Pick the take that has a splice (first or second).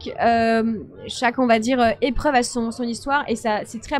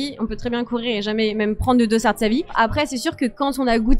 second